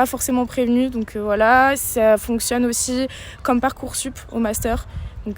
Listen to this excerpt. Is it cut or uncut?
uncut